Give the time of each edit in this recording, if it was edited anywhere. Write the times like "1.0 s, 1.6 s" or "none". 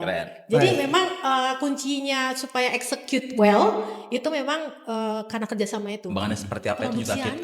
6.1 s